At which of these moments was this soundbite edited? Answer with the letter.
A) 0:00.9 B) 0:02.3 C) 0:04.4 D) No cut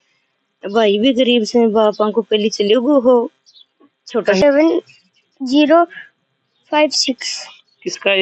C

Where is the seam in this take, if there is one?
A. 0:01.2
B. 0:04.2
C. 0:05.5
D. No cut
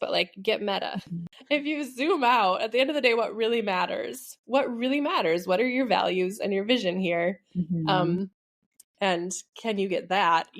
A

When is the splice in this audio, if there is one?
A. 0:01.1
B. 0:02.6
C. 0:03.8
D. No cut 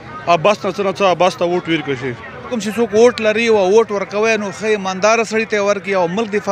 B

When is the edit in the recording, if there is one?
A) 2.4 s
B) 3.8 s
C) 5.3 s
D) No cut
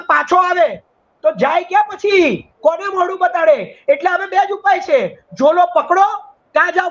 D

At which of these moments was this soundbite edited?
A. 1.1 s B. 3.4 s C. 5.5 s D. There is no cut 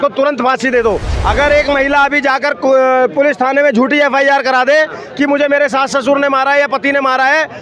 A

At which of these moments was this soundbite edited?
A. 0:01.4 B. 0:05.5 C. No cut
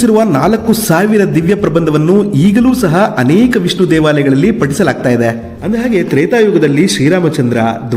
B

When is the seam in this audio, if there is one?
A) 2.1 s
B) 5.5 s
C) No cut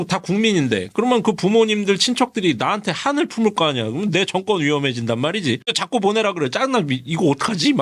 C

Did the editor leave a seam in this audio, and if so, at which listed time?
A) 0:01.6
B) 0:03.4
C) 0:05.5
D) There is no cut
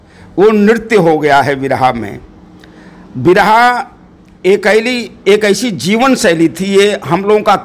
D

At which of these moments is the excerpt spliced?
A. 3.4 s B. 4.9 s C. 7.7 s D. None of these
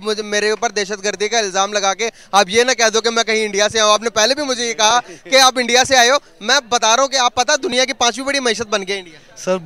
D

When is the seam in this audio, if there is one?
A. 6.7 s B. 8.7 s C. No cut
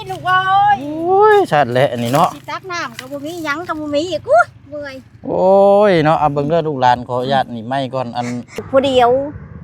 B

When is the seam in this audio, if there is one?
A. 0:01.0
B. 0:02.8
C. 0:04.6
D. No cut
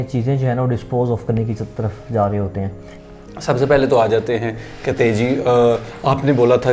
B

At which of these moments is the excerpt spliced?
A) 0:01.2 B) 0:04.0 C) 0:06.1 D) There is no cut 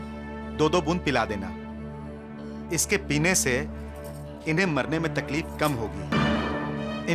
C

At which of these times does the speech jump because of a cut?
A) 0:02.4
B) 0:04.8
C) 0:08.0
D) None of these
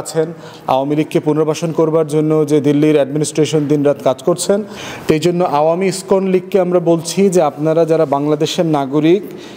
B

